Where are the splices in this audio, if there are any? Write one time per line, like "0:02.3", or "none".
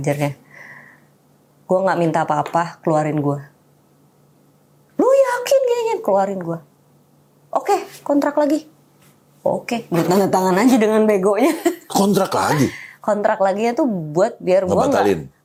none